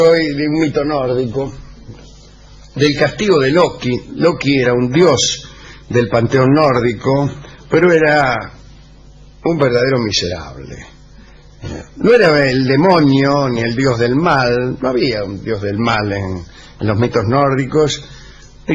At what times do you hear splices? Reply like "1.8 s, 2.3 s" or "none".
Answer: none